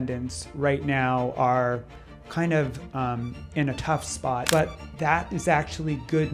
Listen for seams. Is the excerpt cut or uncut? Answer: cut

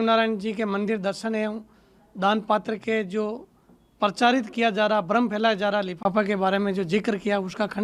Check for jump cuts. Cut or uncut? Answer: uncut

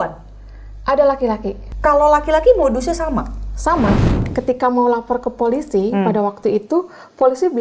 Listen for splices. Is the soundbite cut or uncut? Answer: cut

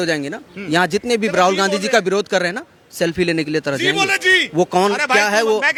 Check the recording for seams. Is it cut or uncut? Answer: uncut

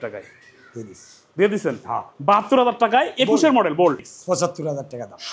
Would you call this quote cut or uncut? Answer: cut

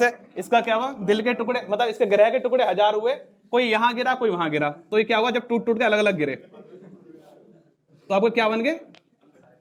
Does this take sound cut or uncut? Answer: uncut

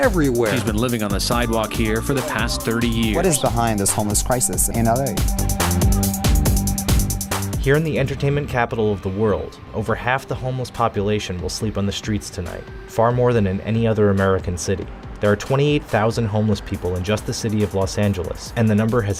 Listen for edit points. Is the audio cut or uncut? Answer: uncut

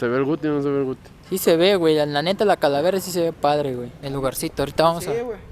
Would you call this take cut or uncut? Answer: cut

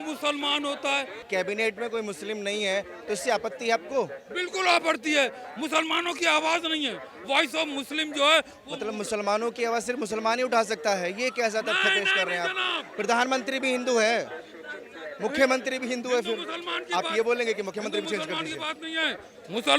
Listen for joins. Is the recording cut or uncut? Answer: uncut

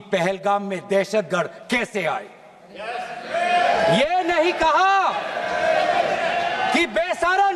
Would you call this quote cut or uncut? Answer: uncut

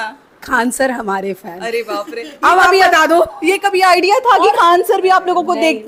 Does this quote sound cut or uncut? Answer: uncut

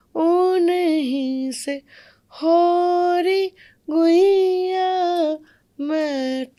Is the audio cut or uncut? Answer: uncut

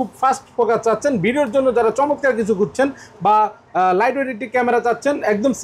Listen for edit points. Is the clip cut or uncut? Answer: uncut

